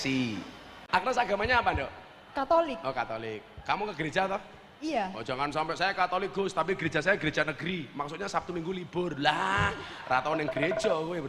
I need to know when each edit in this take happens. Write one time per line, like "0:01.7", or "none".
0:01.0